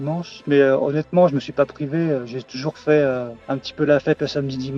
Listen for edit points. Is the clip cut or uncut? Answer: uncut